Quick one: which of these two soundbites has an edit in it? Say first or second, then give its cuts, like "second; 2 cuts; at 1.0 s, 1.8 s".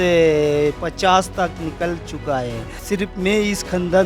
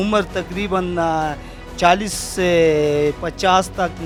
first; 1 cut; at 2.8 s